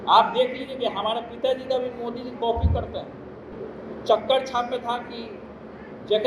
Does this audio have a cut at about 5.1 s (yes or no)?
no